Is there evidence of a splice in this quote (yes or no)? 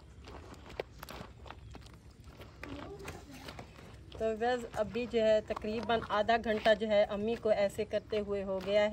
no